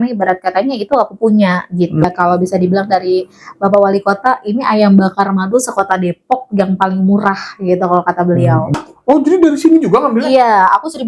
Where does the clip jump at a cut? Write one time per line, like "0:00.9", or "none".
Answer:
0:02.0
0:08.7

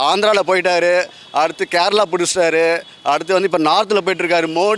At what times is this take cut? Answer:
none

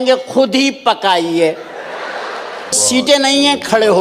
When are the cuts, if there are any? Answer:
0:02.8

